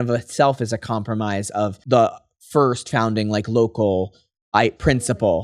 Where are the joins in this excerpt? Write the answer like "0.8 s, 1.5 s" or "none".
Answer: 1.8 s